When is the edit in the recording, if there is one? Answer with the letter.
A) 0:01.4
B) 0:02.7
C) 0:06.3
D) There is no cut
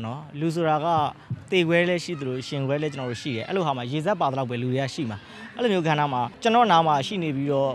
C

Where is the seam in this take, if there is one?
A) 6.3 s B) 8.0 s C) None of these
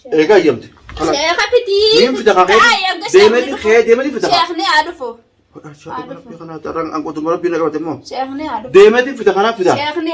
C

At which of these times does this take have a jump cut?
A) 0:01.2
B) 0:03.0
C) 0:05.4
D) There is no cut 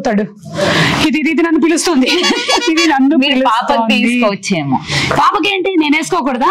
D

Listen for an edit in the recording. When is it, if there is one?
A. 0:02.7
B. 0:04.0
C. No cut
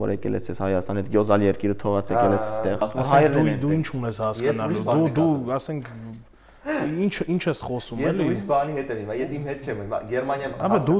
A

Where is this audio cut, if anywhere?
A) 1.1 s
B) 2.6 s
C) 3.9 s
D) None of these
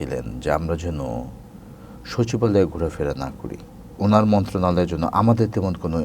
C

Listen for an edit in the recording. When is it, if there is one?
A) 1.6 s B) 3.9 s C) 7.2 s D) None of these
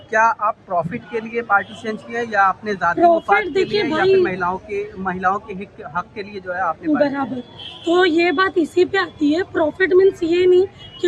D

